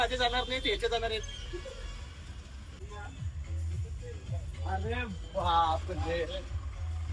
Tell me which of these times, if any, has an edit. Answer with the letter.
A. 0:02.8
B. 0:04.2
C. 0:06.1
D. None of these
A